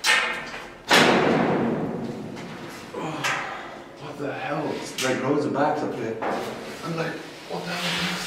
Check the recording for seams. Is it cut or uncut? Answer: uncut